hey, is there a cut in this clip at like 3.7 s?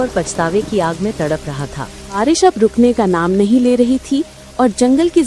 no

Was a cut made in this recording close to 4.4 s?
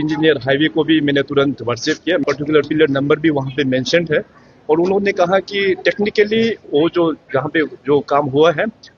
no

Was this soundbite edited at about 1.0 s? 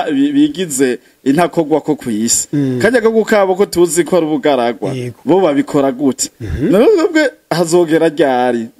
no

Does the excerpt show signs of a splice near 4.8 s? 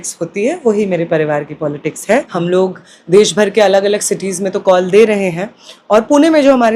no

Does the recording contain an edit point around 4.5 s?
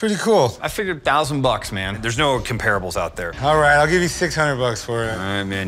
no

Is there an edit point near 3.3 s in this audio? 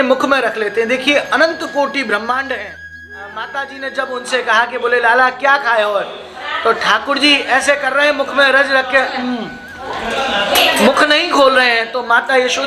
yes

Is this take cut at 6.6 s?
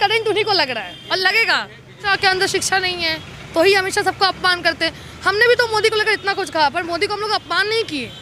no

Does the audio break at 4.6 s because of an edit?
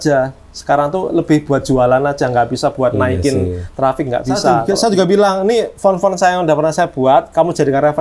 yes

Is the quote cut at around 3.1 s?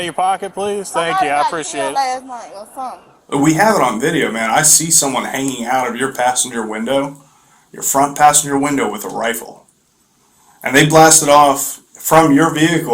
yes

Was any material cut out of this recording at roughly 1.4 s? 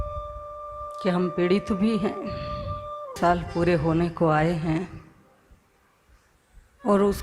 no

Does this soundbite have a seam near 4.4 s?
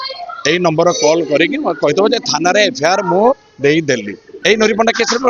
yes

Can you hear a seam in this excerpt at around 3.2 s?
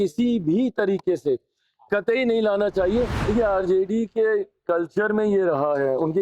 yes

